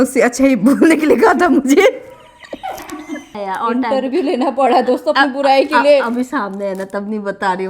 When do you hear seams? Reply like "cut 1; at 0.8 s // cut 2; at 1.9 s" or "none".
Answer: cut 1; at 3.3 s